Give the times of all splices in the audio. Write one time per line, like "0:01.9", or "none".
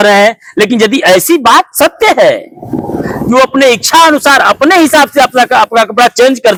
none

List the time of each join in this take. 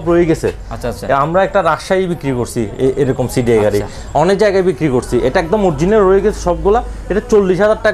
none

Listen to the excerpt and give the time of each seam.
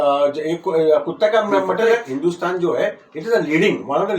0:01.9

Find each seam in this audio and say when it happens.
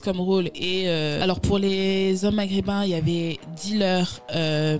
0:01.2

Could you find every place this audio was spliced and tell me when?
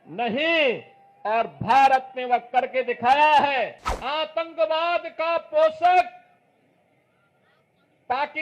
0:03.9

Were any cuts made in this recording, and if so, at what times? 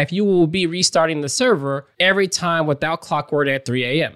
0:01.9

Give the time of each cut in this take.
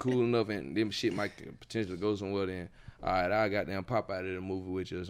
none

